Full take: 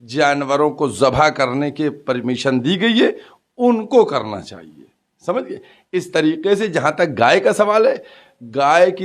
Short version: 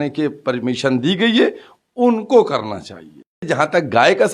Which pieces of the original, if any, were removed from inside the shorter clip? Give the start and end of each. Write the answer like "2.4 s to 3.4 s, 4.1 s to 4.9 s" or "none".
5.1 s to 6.7 s